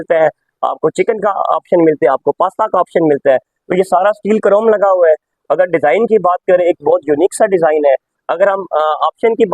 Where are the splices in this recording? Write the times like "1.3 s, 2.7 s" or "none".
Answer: none